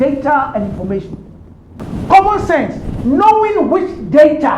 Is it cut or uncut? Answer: cut